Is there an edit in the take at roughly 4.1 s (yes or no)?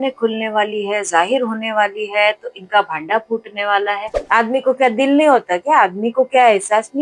yes